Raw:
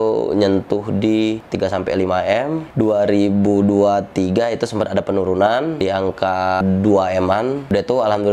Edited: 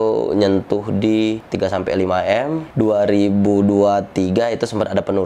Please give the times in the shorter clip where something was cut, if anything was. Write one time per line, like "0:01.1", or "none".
none